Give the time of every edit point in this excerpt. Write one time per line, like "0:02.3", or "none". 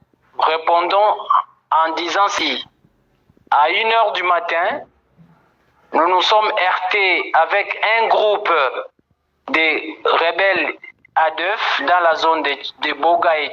0:02.4